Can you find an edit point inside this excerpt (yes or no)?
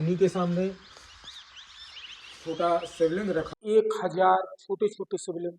yes